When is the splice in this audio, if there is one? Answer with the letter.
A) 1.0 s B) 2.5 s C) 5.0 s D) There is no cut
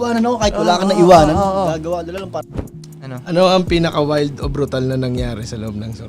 B